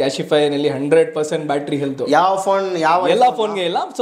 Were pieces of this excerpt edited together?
no; 0 cuts

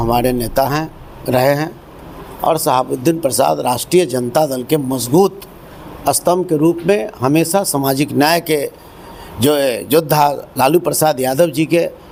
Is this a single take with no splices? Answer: yes; 0 cuts

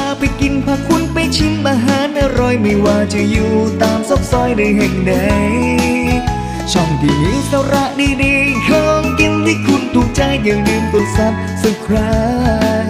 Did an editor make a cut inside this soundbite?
no; 0 cuts

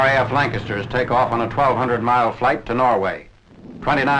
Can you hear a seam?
yes; 1 cut; at 3.3 s

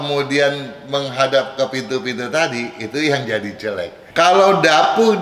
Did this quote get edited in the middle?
yes; 1 cut; at 4.0 s

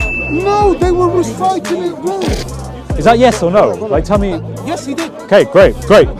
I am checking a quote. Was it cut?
yes; 1 cut; at 2.5 s

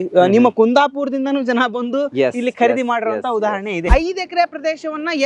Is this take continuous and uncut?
no; 1 cut; at 3.9 s

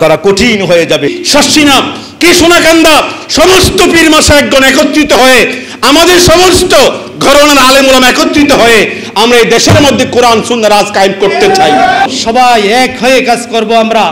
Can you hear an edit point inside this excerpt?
yes; 2 cuts; at 1.1 s, 12.1 s

